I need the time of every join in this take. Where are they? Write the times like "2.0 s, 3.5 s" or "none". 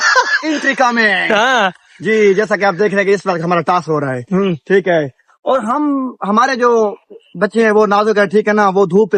none